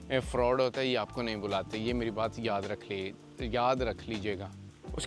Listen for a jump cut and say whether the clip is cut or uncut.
uncut